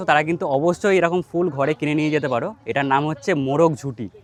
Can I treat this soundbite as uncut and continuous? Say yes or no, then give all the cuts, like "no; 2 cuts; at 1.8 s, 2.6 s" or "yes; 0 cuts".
yes; 0 cuts